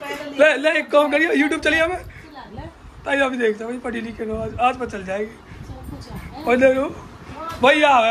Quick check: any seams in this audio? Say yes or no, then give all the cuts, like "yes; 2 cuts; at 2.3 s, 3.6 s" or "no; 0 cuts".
no; 0 cuts